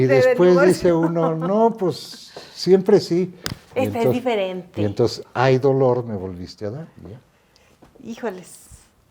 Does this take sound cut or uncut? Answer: uncut